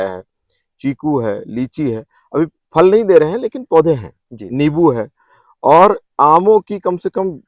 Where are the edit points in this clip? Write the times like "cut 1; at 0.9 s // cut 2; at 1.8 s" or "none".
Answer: none